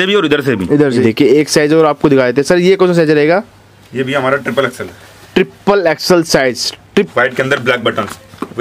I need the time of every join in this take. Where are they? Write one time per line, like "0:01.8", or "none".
0:01.0
0:07.1